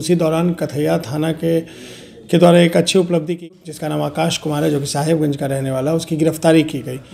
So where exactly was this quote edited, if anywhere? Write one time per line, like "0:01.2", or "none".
0:03.4